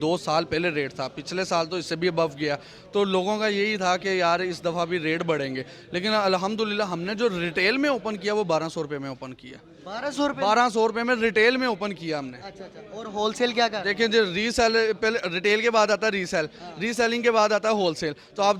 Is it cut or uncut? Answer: uncut